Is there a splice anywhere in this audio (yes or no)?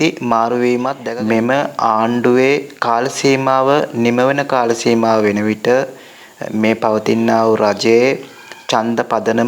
yes